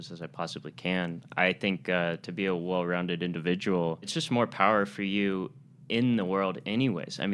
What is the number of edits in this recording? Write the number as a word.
one